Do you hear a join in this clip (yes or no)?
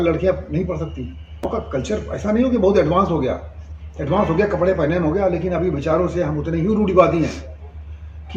yes